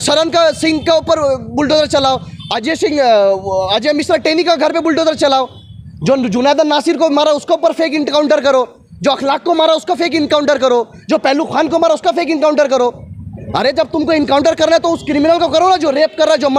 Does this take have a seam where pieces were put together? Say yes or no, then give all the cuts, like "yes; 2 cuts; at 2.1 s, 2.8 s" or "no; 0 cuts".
no; 0 cuts